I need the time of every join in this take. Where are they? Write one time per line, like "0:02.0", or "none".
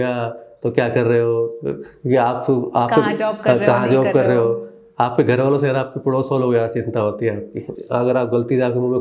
0:07.8